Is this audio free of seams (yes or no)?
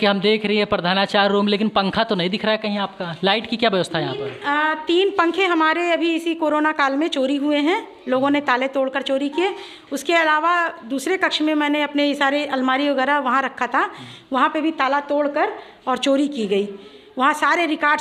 yes